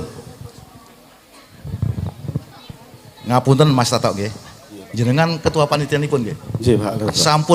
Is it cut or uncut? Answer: cut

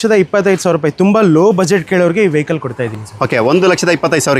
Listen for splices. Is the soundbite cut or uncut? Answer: uncut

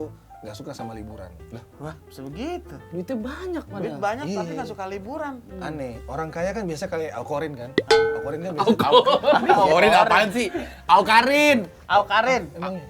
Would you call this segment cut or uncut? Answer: uncut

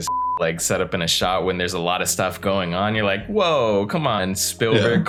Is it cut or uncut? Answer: uncut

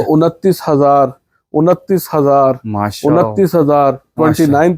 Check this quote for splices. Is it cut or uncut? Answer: uncut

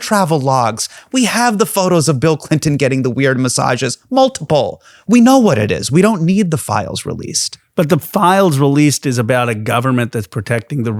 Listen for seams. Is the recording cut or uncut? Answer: uncut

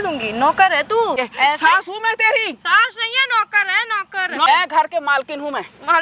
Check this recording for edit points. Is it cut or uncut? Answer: cut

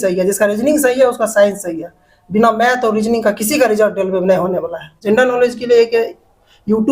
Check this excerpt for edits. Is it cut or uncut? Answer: cut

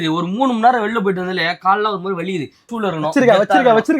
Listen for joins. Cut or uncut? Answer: cut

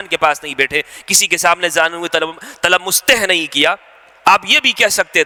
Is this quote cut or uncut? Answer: uncut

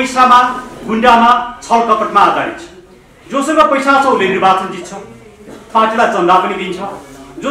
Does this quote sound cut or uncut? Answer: uncut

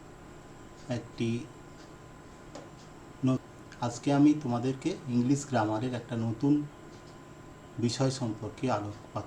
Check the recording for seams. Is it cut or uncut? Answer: cut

